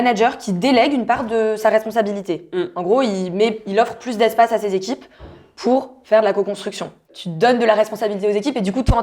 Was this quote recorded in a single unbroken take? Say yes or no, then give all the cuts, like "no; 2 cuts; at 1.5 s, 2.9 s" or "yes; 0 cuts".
no; 1 cut; at 7.0 s